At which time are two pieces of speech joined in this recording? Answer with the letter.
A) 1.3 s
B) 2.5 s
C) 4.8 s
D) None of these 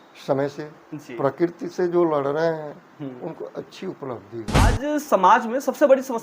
C